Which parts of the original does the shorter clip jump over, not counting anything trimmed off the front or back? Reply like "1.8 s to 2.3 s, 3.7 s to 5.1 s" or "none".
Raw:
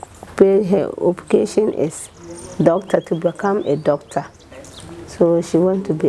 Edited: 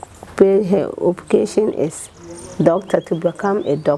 none